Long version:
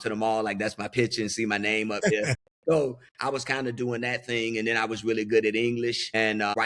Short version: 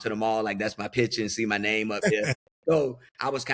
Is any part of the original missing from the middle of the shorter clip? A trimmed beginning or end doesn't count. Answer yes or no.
no